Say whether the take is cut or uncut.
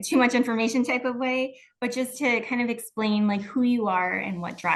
uncut